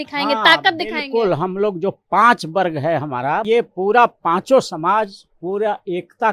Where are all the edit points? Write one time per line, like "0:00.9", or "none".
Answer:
0:03.4